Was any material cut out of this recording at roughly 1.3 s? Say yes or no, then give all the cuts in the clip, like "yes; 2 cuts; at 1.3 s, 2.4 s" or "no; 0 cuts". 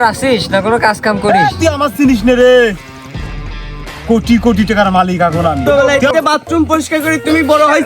yes; 2 cuts; at 1.3 s, 5.6 s